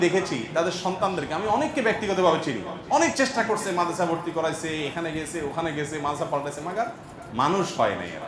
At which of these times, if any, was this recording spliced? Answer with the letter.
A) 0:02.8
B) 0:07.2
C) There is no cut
C